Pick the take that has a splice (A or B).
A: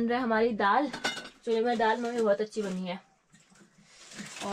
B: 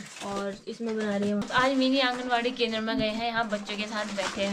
B